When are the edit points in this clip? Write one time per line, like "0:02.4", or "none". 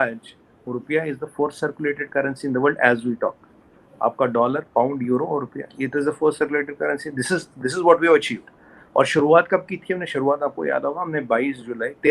none